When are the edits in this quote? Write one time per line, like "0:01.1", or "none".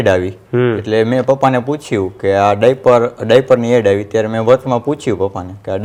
none